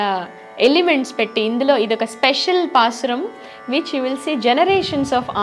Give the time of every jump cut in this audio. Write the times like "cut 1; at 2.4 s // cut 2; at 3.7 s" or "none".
none